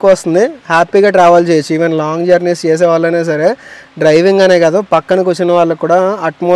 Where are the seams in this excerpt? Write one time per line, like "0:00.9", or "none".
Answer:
none